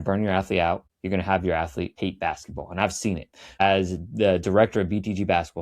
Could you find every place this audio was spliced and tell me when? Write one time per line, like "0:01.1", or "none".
0:00.9
0:01.9